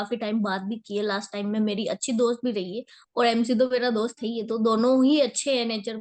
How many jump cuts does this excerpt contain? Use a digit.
0